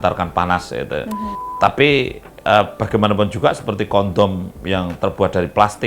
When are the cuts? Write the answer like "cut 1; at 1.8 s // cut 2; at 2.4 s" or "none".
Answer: cut 1; at 1.4 s